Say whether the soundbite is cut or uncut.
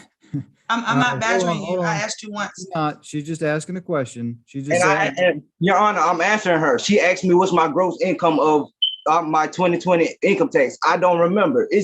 uncut